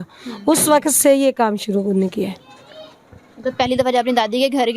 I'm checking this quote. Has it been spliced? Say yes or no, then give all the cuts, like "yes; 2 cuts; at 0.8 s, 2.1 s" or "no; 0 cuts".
no; 0 cuts